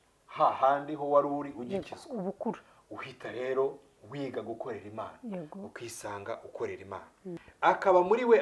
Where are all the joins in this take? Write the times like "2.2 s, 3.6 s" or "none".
7.5 s